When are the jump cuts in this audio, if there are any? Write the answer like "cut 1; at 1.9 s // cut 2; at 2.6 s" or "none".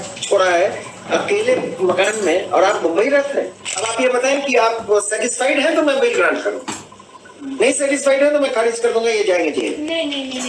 cut 1; at 3.9 s